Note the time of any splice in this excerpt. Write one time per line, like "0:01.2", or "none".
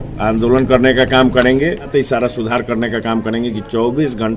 0:01.9